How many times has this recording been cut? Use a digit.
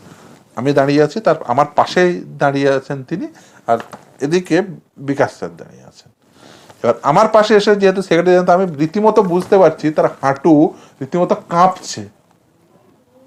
0